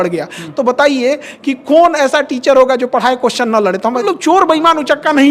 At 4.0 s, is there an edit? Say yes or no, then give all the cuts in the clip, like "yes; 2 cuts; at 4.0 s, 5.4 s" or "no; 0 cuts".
yes; 1 cut; at 4.0 s